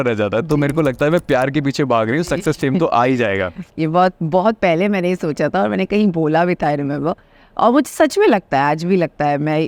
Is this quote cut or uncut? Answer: uncut